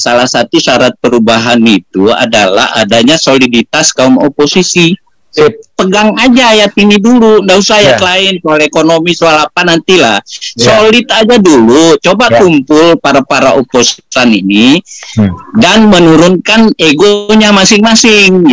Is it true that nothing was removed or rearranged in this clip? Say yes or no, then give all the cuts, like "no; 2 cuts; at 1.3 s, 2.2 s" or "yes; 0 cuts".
yes; 0 cuts